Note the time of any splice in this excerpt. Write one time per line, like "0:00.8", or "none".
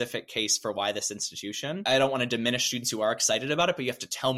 none